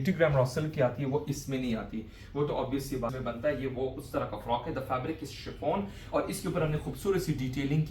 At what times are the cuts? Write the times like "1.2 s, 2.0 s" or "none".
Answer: 3.1 s